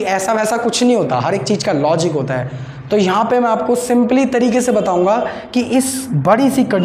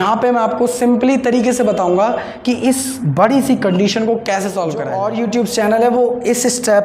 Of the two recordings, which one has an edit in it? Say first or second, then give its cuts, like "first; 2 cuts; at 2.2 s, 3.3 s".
second; 1 cut; at 4.9 s